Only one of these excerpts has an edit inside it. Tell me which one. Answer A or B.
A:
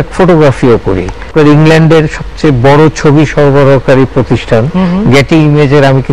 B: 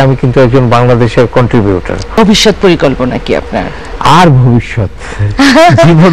B